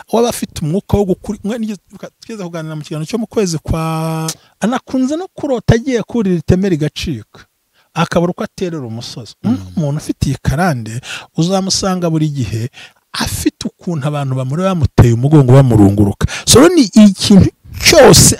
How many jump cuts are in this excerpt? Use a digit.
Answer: 1